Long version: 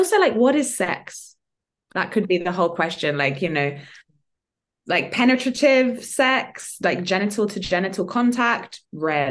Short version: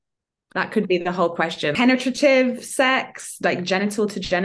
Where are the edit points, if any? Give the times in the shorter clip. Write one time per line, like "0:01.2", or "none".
0:01.8